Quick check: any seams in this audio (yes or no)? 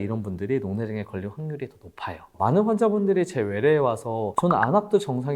no